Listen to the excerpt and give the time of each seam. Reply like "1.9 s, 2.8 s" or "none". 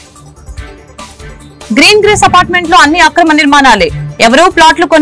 1.7 s